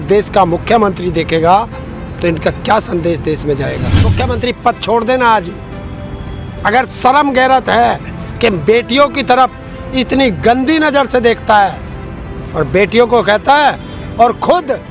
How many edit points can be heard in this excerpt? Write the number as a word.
one